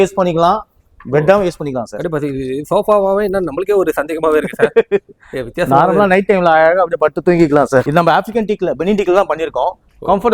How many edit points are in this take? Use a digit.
1